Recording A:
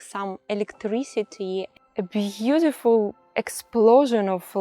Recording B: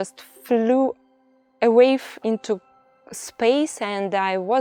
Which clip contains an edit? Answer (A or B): A